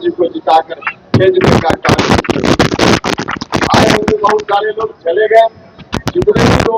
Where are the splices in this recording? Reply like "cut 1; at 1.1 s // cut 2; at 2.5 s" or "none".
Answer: none